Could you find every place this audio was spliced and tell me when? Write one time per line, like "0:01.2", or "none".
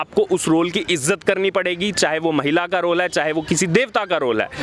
none